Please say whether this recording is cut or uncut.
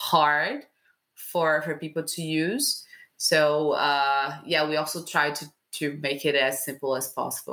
uncut